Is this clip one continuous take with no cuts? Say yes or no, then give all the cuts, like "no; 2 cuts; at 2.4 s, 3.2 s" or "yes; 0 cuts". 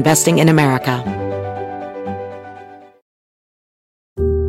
no; 1 cut; at 1.0 s